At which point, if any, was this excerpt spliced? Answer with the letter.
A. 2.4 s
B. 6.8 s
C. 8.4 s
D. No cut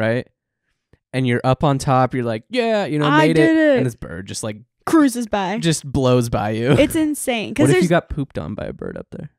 B